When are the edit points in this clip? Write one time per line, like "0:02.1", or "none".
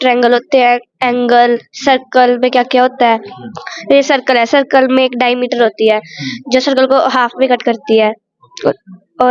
none